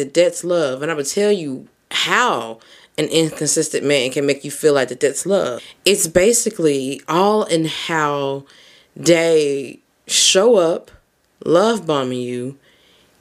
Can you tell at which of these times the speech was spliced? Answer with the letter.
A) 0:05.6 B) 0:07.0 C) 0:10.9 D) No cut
A